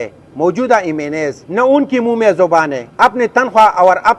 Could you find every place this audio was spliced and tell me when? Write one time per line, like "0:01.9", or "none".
0:01.4
0:02.8